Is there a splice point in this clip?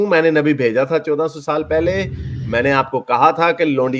no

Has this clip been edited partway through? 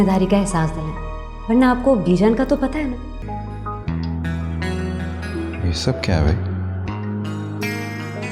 yes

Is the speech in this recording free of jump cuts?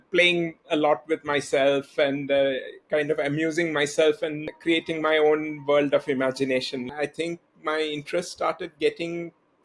no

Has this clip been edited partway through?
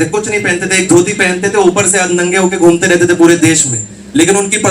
no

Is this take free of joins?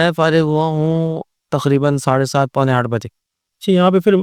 yes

